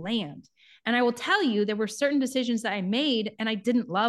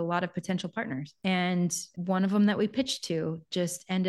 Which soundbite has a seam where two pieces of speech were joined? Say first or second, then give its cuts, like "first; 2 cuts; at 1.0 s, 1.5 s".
second; 2 cuts; at 1.1 s, 1.9 s